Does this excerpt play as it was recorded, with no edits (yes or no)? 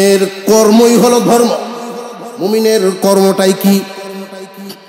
yes